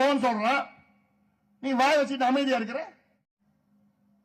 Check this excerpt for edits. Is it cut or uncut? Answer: cut